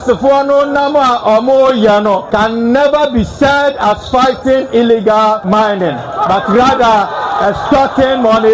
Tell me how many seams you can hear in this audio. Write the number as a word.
two